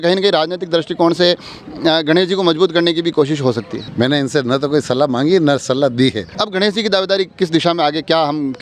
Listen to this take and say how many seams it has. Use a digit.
2